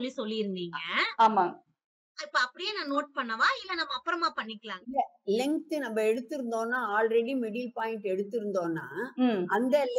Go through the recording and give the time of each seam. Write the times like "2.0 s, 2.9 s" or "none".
4.6 s